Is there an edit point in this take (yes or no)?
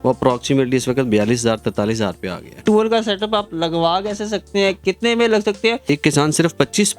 yes